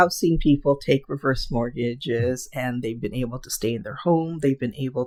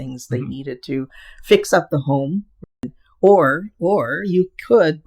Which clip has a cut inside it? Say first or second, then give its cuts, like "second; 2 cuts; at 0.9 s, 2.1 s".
second; 1 cut; at 2.6 s